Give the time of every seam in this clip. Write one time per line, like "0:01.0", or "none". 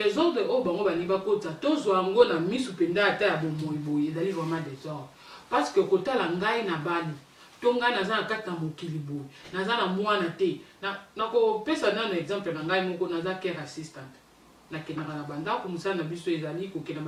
none